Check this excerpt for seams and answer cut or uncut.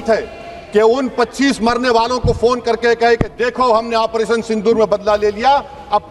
uncut